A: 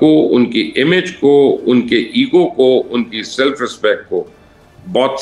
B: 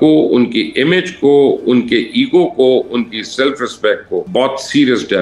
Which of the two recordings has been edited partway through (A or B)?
B